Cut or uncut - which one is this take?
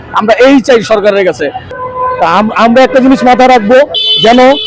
cut